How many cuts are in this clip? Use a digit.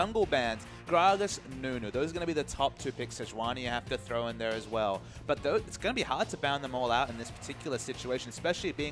1